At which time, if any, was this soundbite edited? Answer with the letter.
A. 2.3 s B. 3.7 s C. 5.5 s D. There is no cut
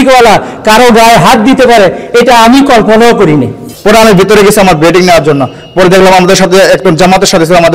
B